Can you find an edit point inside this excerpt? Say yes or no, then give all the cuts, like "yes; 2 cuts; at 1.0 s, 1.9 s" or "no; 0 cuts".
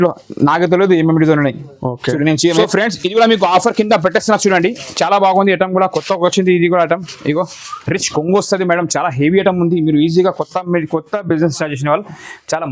yes; 1 cut; at 2.6 s